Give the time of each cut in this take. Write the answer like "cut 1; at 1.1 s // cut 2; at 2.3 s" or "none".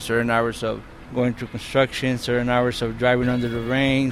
cut 1; at 0.9 s